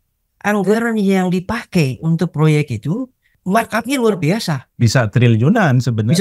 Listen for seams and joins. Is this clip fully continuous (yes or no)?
no